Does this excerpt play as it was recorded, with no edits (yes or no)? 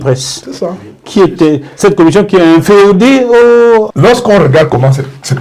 no